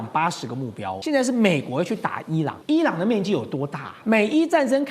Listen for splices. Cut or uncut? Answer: cut